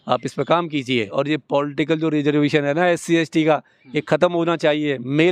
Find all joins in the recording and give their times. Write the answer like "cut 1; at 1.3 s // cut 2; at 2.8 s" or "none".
cut 1; at 1.1 s